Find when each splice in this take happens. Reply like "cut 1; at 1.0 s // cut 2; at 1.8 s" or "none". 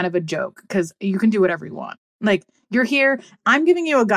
cut 1; at 2.1 s